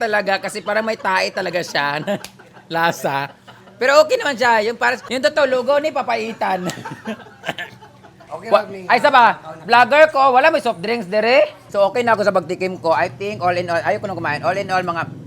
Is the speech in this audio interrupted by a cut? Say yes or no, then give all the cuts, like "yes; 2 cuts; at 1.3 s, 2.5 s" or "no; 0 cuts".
yes; 3 cuts; at 5.1 s, 8.2 s, 11.6 s